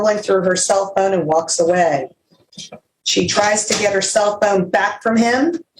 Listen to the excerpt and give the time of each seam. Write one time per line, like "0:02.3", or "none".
none